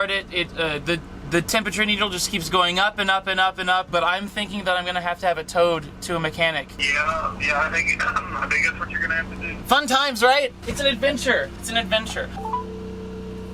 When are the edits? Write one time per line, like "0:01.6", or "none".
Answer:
0:03.9
0:06.7
0:09.6
0:12.3

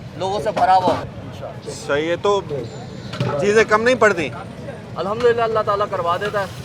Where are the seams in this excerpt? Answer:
none

